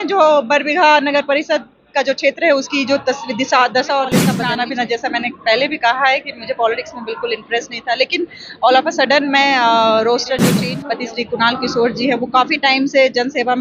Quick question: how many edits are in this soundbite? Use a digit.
2